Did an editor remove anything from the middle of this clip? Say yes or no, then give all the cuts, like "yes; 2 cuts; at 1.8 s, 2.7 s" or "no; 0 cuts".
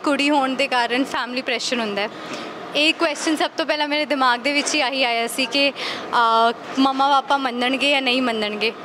no; 0 cuts